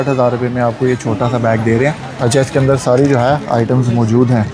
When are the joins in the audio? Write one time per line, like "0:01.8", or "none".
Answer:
0:02.1